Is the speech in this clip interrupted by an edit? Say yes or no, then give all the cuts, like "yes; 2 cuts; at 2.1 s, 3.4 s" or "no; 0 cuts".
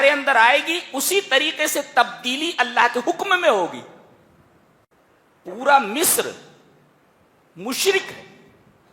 yes; 1 cut; at 4.9 s